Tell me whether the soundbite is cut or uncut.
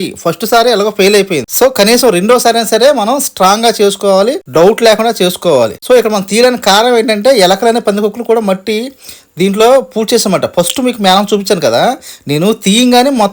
uncut